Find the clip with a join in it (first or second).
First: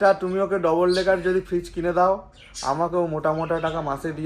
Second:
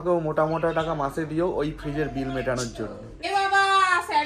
second